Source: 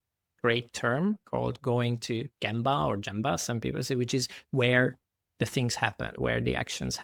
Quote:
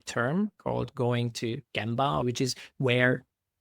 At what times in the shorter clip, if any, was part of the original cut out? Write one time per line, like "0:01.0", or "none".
0:02.2